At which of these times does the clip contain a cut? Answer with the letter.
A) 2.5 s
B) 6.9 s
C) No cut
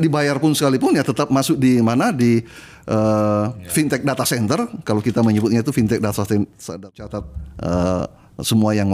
B